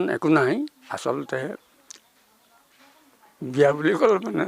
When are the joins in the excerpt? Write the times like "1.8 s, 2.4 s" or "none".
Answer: none